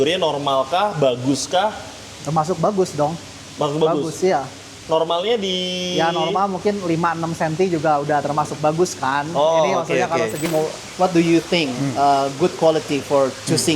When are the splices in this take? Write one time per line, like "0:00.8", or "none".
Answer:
0:10.5

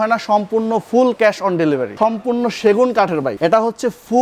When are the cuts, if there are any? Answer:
0:01.9
0:03.3

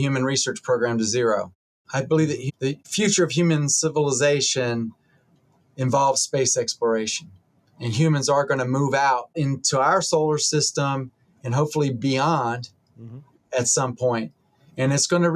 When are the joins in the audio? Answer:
0:01.8
0:02.8
0:09.4

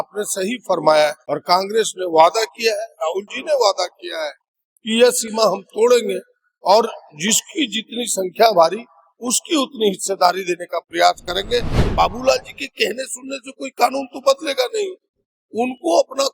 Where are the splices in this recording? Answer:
0:01.3
0:11.8

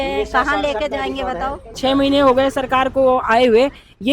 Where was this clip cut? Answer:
0:01.7

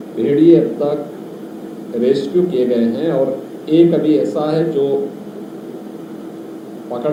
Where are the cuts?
none

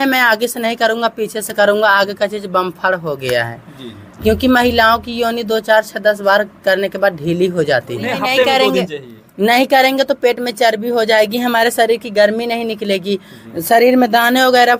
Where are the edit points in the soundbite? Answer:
0:08.1

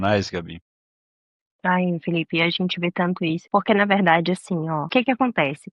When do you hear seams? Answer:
0:03.4
0:04.8

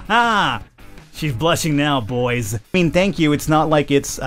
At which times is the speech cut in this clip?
0:02.7

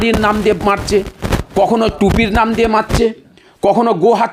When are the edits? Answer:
none

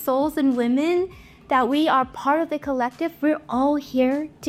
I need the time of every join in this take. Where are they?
none

